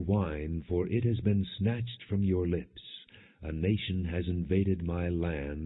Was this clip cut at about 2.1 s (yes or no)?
no